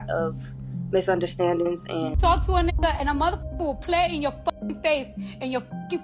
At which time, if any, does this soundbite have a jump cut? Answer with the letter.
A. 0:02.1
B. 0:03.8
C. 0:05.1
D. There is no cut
A